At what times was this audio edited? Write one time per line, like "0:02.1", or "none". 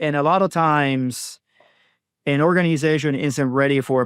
none